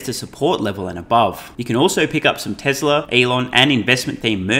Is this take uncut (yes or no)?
no